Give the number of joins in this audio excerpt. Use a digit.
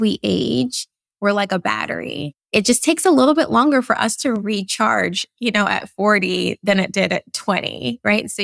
1